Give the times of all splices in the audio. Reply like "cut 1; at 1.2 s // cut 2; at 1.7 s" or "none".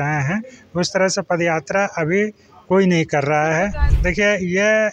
cut 1; at 3.8 s